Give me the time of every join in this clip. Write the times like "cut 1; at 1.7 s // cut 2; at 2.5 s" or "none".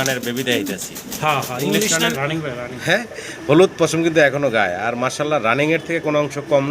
cut 1; at 2.1 s